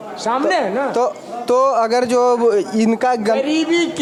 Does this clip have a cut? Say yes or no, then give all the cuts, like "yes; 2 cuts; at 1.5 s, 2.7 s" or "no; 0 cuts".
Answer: no; 0 cuts